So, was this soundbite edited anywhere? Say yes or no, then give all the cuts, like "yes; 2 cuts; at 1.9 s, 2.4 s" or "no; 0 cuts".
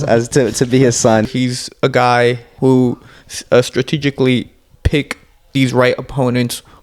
yes; 3 cuts; at 1.2 s, 2.5 s, 4.8 s